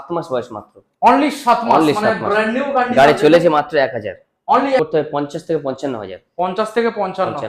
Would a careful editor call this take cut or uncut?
cut